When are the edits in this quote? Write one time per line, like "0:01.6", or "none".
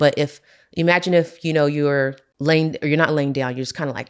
0:02.3